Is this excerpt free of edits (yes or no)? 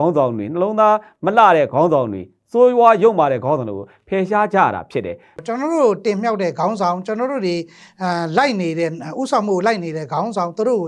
no